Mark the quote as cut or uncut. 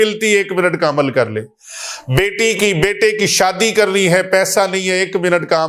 uncut